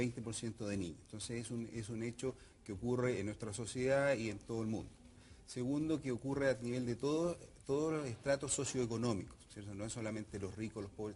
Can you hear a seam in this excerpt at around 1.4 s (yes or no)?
no